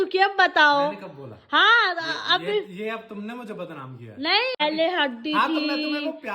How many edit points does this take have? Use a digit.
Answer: 1